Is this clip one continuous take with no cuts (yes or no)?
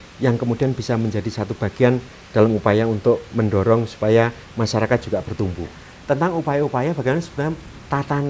no